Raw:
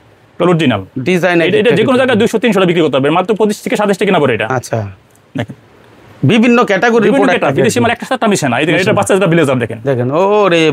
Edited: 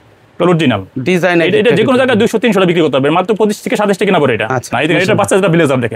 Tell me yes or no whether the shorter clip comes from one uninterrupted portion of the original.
no